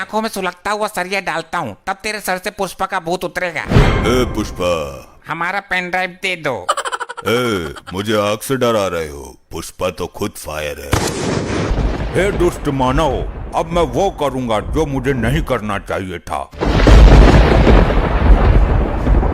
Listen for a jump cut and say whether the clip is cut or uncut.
cut